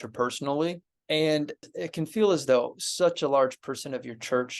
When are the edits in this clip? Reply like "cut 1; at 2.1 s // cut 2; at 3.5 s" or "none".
cut 1; at 0.9 s // cut 2; at 1.7 s